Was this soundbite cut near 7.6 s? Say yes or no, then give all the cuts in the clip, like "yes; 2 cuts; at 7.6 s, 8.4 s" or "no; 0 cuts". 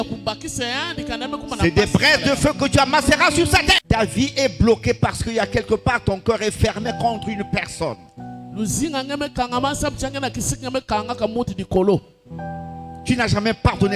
no; 1 cut; at 3.8 s